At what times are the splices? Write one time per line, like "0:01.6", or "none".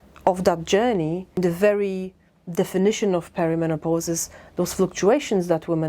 0:01.4